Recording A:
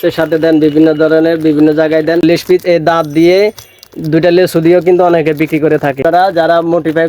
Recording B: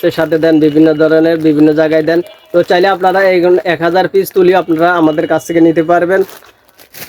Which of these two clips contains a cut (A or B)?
A